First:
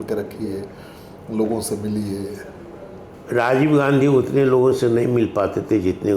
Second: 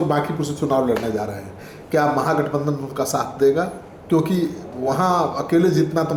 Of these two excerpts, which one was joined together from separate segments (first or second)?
first